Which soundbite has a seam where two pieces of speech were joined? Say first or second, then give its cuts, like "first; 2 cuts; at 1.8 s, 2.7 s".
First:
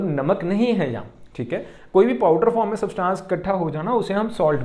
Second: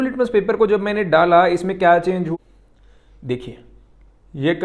second; 1 cut; at 2.3 s